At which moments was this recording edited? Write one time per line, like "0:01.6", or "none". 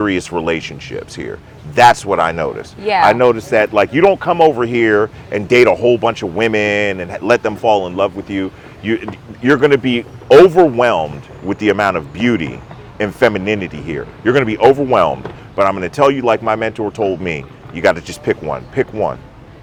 none